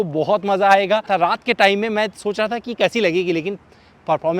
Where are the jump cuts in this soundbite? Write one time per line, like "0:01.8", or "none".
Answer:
0:01.1